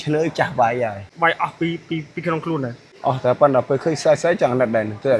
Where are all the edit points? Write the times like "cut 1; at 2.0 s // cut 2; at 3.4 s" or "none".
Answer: cut 1; at 1.0 s // cut 2; at 2.8 s